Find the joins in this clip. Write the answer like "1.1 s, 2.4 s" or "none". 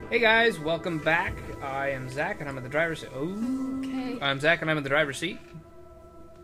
none